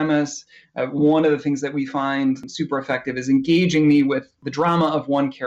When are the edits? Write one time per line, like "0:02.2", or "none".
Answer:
0:02.5
0:04.3